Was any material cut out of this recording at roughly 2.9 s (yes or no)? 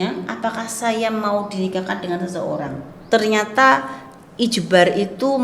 yes